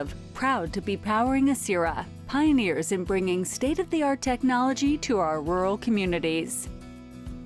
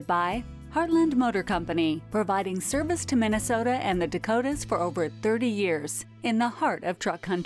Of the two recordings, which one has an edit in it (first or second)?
first